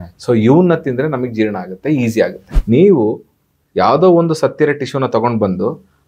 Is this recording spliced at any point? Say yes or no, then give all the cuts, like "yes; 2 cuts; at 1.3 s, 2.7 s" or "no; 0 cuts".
yes; 1 cut; at 2.4 s